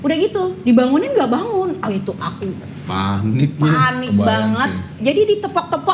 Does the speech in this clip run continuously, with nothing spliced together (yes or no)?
no